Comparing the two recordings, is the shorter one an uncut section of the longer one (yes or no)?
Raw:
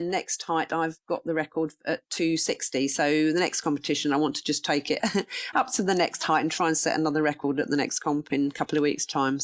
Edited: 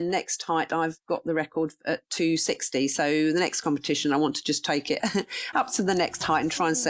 yes